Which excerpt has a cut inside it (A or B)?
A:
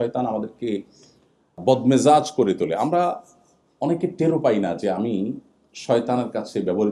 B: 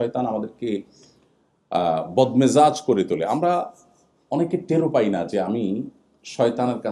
A